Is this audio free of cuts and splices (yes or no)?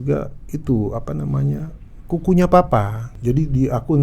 no